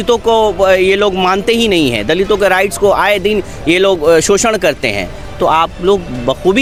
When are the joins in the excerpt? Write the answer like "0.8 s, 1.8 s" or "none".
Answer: none